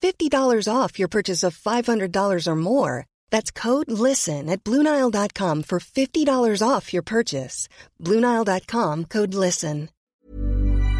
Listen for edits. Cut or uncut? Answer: cut